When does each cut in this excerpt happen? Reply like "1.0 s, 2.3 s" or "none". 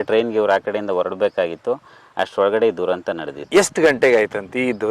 none